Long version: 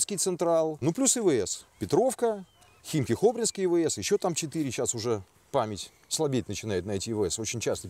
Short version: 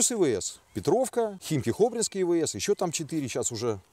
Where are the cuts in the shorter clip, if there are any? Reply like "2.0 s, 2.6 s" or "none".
1.4 s